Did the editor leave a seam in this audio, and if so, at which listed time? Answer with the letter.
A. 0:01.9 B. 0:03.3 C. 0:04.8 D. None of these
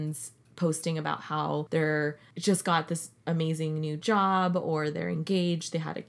A